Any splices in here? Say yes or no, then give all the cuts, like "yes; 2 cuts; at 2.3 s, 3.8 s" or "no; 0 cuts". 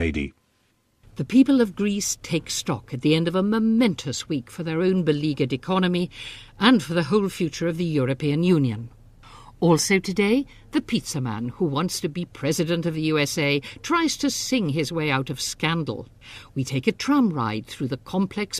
no; 0 cuts